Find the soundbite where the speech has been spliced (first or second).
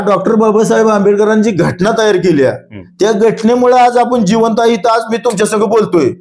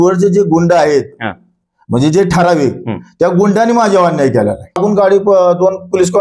second